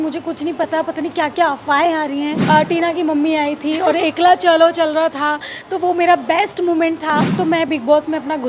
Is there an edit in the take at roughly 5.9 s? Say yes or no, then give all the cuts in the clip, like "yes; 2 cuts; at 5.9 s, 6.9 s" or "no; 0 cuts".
no; 2 cuts; at 2.4 s, 7.3 s